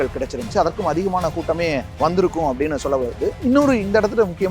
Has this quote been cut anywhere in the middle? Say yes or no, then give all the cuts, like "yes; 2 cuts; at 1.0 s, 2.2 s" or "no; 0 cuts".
yes; 1 cut; at 1.9 s